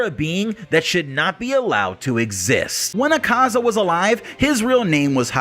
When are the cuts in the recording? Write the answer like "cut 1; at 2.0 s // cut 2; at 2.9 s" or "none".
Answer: cut 1; at 2.8 s